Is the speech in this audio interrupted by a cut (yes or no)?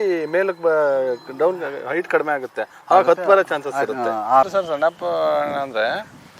yes